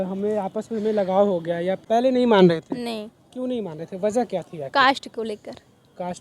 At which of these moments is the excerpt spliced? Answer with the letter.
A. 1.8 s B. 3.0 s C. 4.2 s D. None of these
A